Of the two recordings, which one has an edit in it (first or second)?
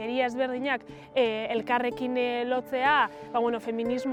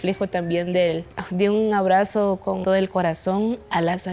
second